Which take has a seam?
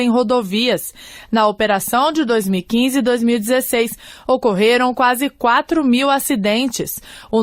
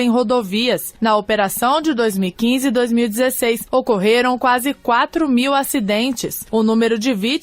second; 3 cuts; at 0.9 s, 3.6 s, 6.3 s

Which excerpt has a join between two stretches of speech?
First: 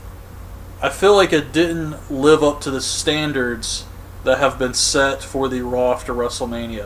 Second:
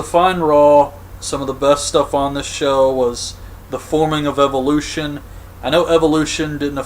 second; 1 cut; at 2.6 s

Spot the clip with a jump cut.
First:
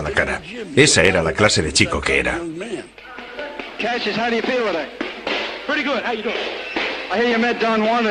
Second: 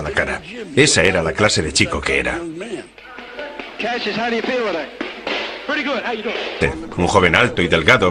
first; 1 cut; at 6.6 s

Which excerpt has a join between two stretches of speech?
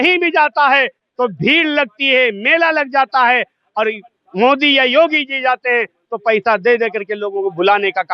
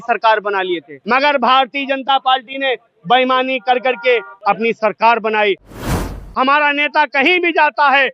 second; 3 cuts; at 0.9 s, 4.3 s, 5.8 s

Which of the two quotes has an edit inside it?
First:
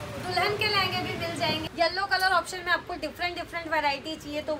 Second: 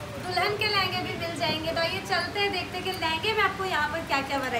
first; 1 cut; at 1.6 s

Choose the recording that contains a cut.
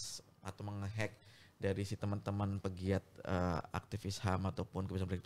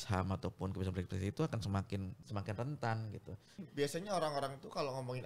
second; 2 cuts; at 2.2 s, 3.6 s

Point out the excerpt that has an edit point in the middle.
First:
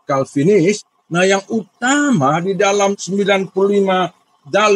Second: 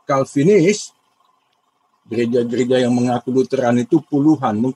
first; 2 cuts; at 0.9 s, 2.9 s

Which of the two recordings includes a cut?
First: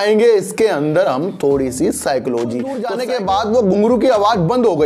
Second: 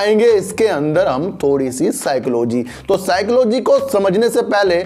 first; 1 cut; at 2.8 s

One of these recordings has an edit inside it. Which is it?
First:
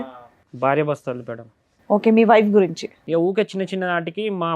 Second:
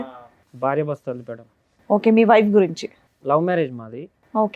first; 1 cut; at 2.9 s

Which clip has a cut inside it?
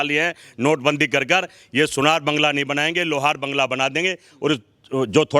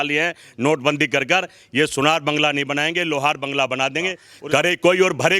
second; 1 cut; at 4.3 s

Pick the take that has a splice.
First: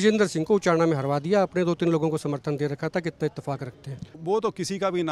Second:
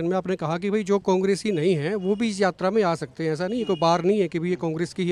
first; 1 cut; at 4.1 s

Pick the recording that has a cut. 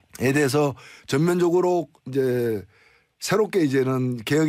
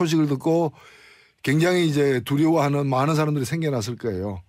first; 1 cut; at 1.7 s

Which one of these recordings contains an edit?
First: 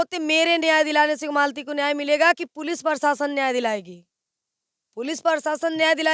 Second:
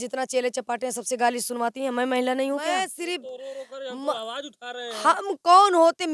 second; 1 cut; at 2.8 s

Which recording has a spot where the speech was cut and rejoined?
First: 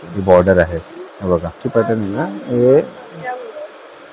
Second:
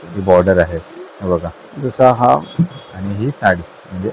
first; 1 cut; at 1.6 s

